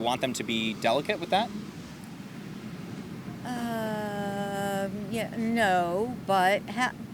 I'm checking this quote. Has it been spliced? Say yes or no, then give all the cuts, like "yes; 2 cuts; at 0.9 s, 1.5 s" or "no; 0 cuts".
no; 0 cuts